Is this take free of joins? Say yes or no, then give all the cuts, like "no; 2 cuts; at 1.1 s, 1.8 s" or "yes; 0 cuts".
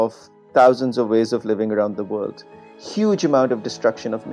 yes; 0 cuts